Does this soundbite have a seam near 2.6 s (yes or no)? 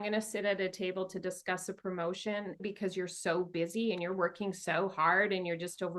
yes